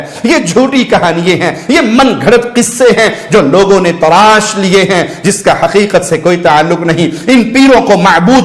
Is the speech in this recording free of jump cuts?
yes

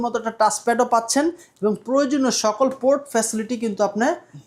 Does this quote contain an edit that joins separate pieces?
no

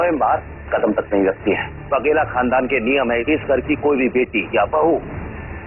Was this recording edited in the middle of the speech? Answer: yes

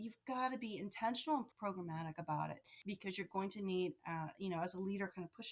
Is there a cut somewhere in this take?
yes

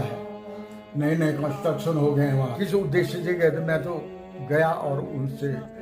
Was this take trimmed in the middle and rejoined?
yes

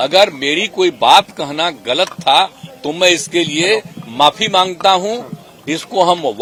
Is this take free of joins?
yes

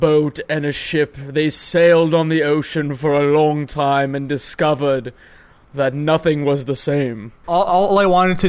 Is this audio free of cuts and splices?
no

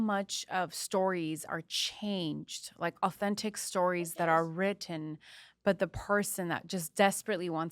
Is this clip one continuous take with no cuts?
yes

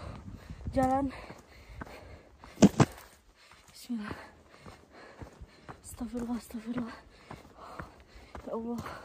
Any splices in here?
no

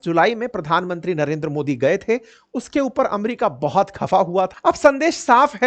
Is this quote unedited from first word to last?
no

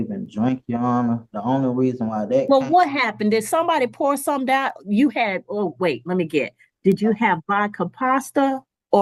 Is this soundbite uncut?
yes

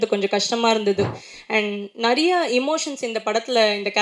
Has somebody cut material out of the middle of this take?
yes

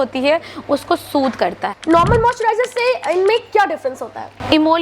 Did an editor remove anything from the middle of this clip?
yes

